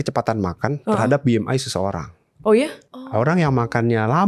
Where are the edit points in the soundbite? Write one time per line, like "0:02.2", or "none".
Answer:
0:02.8